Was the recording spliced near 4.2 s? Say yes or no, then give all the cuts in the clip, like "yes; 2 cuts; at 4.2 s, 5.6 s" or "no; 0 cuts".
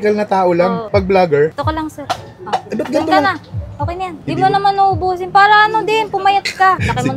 yes; 2 cuts; at 0.8 s, 4.2 s